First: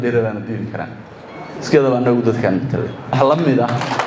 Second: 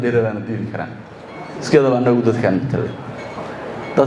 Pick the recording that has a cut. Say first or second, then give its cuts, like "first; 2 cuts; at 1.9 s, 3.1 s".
first; 1 cut; at 3.2 s